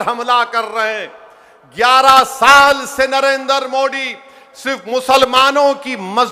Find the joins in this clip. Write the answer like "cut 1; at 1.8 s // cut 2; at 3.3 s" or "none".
none